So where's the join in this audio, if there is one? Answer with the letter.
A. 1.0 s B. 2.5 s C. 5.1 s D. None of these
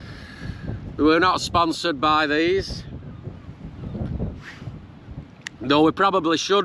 D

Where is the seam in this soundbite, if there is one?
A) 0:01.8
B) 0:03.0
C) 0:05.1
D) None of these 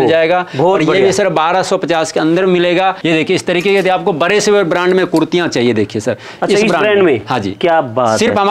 B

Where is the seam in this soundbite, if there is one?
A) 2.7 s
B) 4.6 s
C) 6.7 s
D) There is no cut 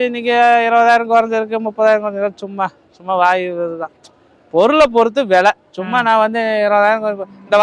D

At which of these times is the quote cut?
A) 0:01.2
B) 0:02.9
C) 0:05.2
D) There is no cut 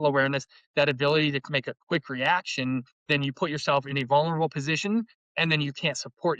B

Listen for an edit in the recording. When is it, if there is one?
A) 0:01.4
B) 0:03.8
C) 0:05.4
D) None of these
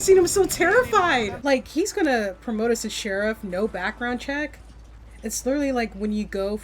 A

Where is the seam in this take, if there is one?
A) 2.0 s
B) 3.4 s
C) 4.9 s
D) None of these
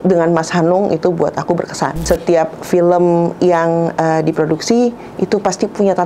A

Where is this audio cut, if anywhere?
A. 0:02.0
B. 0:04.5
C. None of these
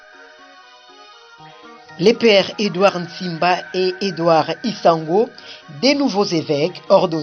A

